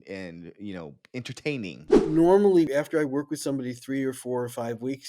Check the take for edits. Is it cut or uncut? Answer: cut